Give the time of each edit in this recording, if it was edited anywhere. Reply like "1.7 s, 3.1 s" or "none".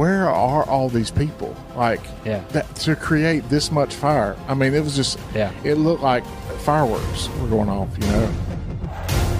8.4 s